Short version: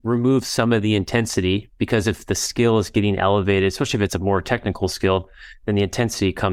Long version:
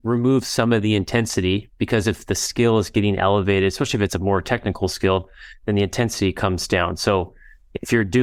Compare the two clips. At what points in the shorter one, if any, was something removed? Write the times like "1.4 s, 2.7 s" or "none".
none